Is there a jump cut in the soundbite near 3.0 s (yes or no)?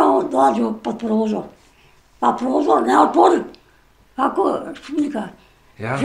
no